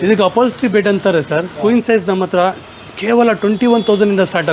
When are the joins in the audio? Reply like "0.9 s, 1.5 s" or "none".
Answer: 1.5 s